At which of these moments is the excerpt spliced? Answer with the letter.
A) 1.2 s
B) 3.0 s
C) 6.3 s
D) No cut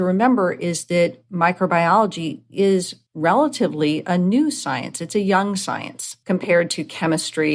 B